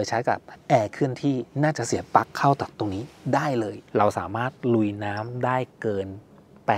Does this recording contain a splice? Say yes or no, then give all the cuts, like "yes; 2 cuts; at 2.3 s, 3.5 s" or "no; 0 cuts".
yes; 1 cut; at 3.8 s